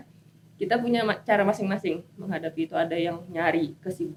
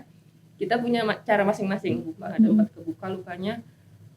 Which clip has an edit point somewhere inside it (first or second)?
second